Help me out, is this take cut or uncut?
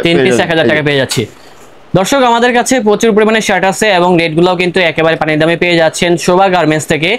uncut